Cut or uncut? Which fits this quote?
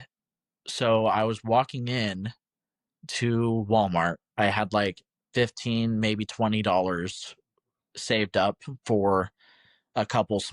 uncut